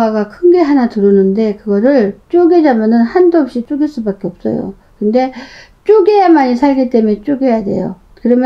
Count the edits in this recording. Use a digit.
1